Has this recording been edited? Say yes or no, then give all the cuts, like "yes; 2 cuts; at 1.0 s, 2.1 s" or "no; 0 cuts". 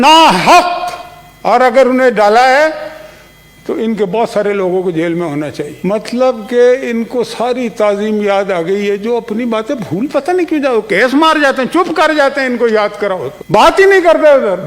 no; 0 cuts